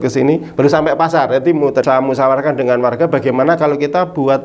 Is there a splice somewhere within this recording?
yes; 1 cut; at 1.8 s

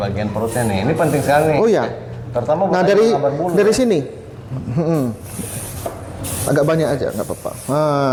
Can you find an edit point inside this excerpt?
no; 0 cuts

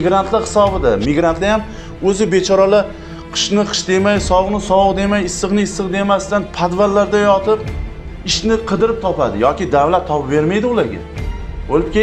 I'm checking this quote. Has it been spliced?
no; 0 cuts

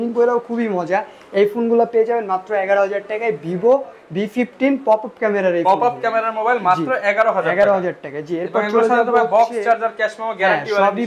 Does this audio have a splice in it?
no; 0 cuts

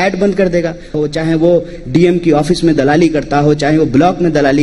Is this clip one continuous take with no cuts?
no; 1 cut; at 0.9 s

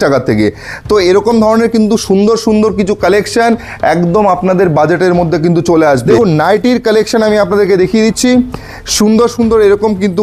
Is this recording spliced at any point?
yes; 1 cut; at 6.0 s

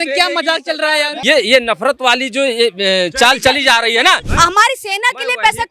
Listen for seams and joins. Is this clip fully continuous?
no; 2 cuts; at 1.1 s, 4.3 s

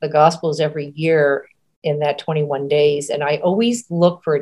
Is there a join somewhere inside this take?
no; 0 cuts

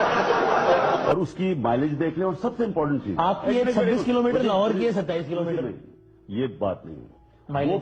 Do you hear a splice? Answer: yes; 1 cut; at 1.0 s

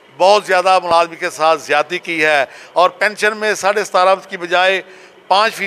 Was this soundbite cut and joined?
no; 0 cuts

